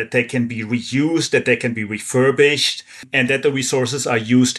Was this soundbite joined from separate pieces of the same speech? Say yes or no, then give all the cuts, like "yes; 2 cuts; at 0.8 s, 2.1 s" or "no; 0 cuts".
yes; 1 cut; at 3.1 s